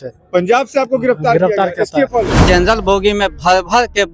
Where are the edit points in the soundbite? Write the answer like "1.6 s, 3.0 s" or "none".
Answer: 2.4 s